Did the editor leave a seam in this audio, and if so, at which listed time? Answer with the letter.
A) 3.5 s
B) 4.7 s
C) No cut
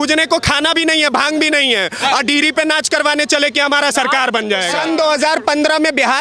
B